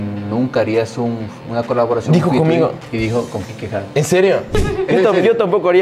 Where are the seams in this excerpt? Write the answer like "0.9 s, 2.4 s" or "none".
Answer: 2.8 s, 4.9 s